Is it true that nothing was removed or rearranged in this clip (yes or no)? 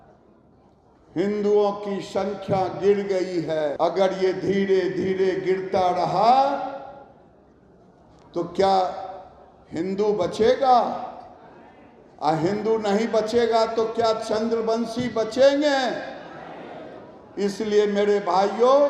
no